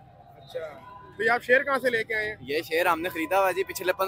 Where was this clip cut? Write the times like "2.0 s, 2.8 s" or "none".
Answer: none